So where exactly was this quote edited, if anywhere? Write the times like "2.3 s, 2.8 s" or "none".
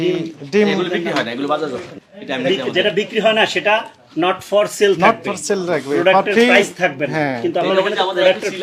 none